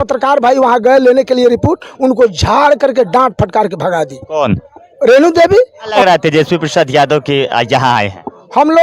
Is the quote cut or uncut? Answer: cut